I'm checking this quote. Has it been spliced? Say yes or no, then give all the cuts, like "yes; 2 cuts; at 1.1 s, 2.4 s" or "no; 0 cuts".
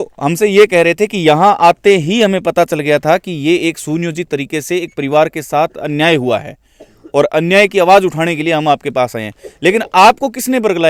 no; 0 cuts